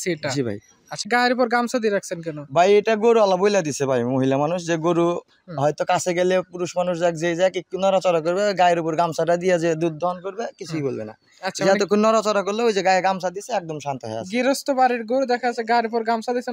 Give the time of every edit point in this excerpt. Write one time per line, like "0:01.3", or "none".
0:01.1